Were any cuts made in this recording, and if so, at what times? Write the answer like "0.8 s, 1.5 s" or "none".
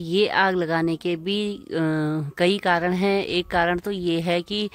none